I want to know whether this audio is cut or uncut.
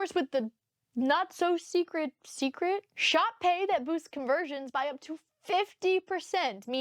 uncut